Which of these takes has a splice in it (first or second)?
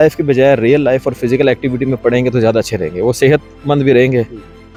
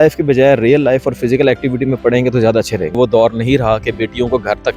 second